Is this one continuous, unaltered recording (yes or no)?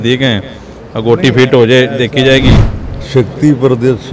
no